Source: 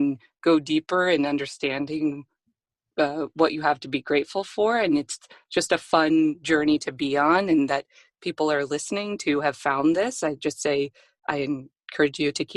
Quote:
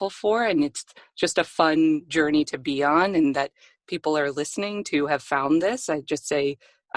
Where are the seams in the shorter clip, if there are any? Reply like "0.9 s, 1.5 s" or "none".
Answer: none